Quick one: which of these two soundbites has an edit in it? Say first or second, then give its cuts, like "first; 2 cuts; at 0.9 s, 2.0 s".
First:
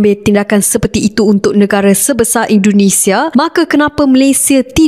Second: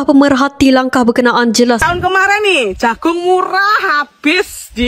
second; 1 cut; at 1.8 s